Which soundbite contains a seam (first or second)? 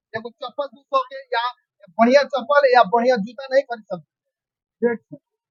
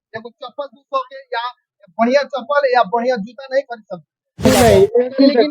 second